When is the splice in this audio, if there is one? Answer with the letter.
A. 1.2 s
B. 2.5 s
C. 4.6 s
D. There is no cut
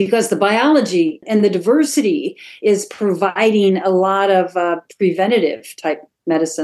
A